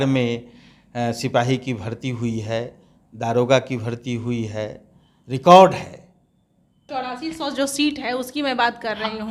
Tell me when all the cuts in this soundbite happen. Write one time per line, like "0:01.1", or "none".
0:06.8